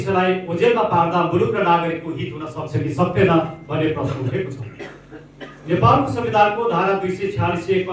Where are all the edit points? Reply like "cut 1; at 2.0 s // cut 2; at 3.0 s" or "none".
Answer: none